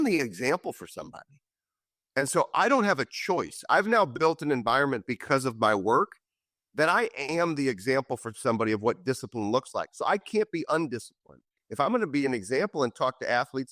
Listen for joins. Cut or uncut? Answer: cut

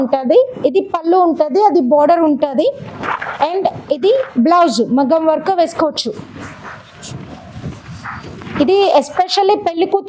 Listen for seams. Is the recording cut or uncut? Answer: uncut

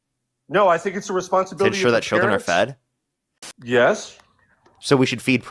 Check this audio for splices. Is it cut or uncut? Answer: cut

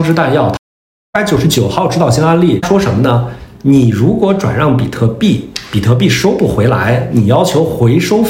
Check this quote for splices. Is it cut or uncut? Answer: cut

